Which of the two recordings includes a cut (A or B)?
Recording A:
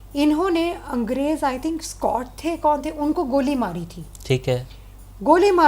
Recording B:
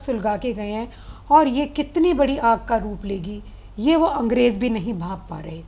A